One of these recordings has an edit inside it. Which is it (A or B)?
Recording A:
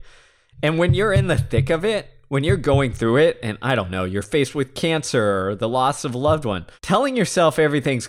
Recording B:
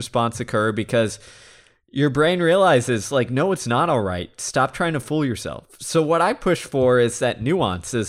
A